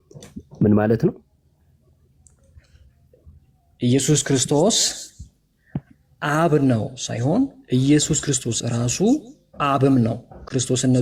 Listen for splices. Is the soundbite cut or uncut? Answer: uncut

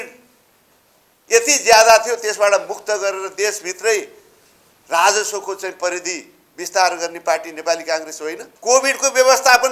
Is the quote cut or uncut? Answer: cut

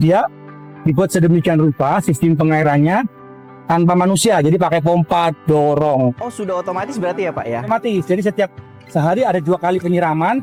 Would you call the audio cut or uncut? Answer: uncut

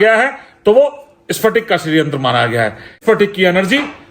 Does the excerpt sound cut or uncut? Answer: cut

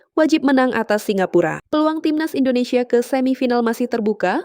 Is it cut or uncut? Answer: cut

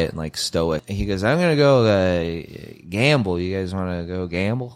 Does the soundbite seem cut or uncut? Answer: cut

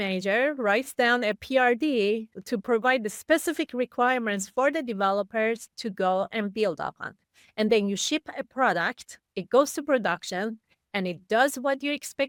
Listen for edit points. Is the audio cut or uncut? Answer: uncut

